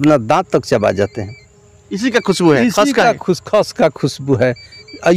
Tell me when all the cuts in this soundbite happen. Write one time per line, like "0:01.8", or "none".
none